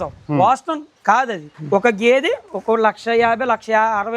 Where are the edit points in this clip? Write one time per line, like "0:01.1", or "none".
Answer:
0:01.5